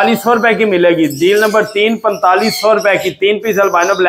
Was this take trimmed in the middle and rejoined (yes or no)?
no